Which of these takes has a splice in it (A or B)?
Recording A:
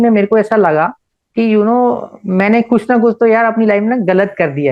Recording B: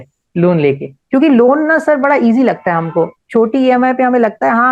B